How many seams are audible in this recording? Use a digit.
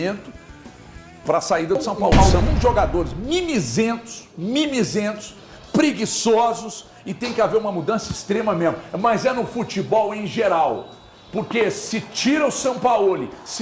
1